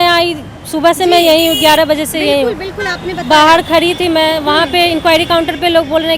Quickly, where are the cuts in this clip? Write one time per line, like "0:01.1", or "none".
none